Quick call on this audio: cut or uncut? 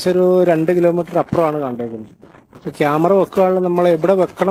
uncut